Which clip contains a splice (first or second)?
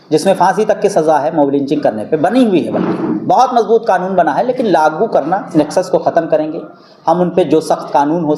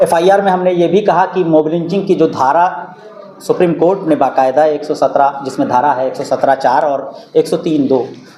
first